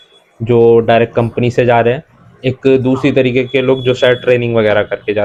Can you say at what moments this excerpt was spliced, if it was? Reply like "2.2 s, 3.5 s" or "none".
none